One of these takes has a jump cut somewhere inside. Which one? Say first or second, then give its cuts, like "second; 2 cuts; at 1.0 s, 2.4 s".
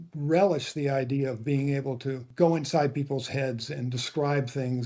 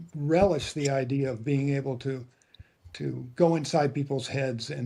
first; 1 cut; at 2.3 s